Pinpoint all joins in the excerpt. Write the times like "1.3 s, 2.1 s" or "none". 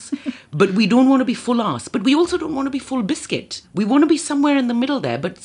3.6 s